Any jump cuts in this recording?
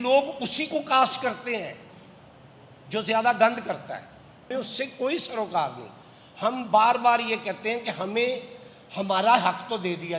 yes; 1 cut; at 4.5 s

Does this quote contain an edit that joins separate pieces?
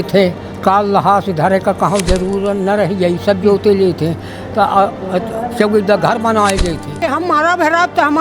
yes; 1 cut; at 7.0 s

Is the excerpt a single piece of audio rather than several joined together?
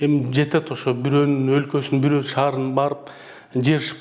yes; 0 cuts

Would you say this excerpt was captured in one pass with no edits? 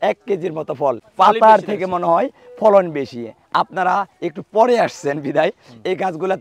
no; 1 cut; at 1.1 s

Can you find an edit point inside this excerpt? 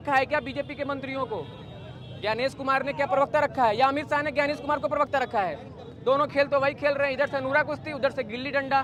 no; 0 cuts

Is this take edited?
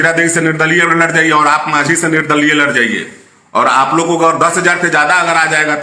no; 0 cuts

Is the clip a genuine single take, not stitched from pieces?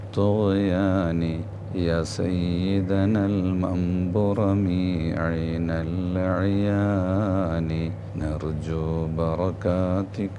no; 2 cuts; at 1.5 s, 8.0 s

